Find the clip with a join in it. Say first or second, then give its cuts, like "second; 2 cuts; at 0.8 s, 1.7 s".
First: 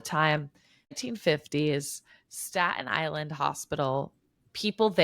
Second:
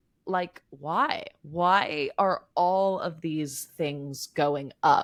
first; 1 cut; at 1.0 s